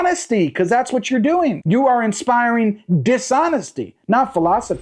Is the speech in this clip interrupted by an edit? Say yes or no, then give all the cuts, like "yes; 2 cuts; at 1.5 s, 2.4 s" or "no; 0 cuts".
yes; 1 cut; at 1.6 s